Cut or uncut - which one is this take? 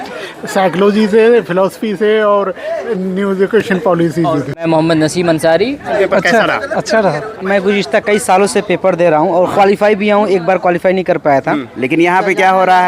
cut